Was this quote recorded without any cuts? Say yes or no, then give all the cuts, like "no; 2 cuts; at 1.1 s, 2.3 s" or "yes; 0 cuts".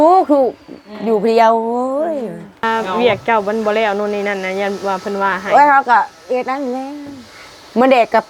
no; 1 cut; at 2.6 s